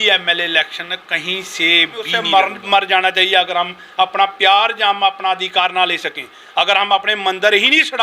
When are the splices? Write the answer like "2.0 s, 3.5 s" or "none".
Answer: 2.2 s